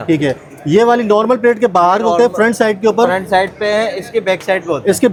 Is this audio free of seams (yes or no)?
yes